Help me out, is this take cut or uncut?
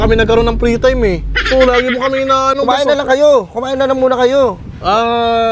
uncut